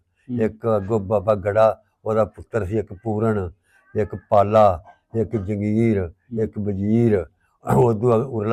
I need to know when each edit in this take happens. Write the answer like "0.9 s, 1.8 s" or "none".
none